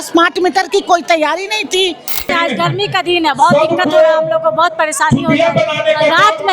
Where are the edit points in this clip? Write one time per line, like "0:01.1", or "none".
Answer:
0:02.3